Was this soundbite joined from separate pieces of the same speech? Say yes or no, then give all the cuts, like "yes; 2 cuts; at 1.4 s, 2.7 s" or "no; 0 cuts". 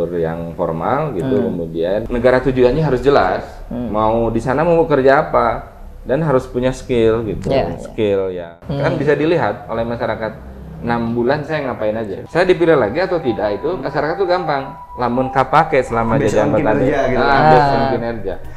yes; 3 cuts; at 2.1 s, 8.6 s, 12.2 s